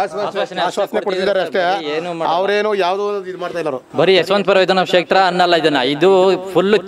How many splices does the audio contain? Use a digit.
0